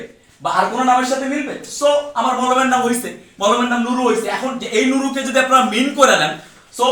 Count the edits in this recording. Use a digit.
0